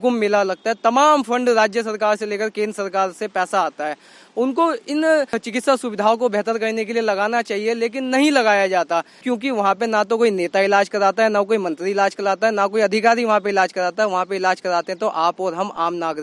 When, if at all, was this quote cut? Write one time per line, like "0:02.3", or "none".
0:05.4
0:09.3

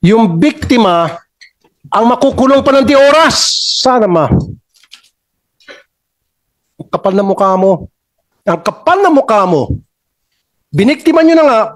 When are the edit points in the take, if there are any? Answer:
none

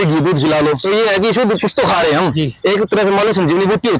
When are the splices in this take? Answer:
0:00.8
0:02.4

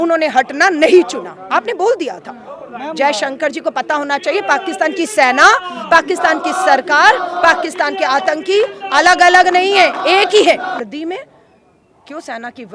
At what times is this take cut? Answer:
0:10.8

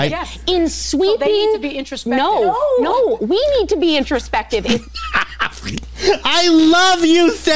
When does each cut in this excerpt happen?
none

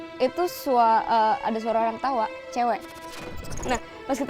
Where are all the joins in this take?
0:03.4

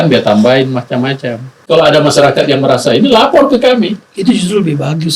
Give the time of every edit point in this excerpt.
0:01.6

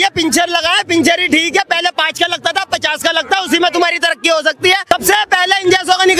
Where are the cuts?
0:04.9

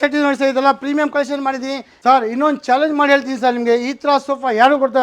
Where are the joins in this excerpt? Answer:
0:01.9

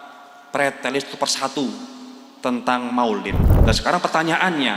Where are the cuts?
0:03.4

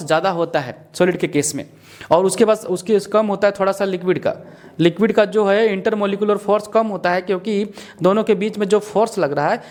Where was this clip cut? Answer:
none

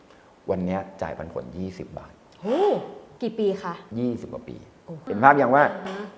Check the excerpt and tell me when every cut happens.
0:03.3
0:05.1

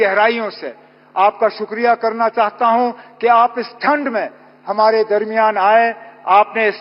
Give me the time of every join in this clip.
none

